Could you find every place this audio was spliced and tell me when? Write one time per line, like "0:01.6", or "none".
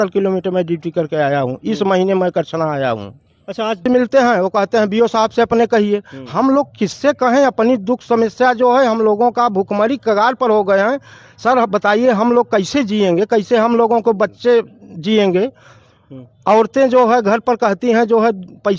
0:03.8